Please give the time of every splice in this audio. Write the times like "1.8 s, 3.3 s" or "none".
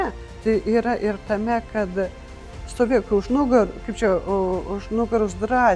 none